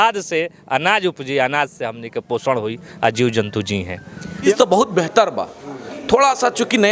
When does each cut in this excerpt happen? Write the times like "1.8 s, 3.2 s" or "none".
4.5 s